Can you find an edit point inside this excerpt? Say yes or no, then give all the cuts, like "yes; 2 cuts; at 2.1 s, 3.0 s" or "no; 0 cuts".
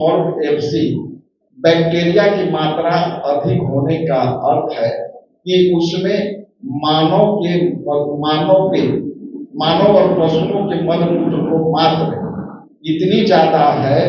no; 0 cuts